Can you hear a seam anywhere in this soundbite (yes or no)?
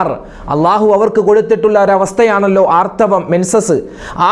no